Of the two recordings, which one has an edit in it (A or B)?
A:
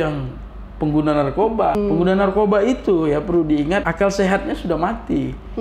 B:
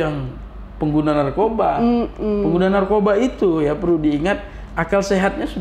A